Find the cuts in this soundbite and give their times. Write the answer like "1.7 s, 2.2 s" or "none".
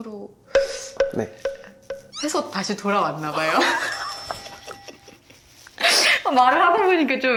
none